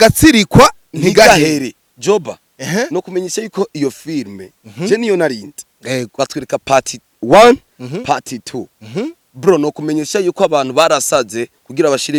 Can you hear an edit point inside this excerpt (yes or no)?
no